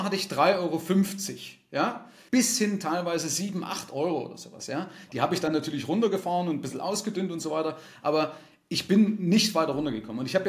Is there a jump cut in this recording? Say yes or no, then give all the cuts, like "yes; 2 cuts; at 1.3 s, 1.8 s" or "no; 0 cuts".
no; 0 cuts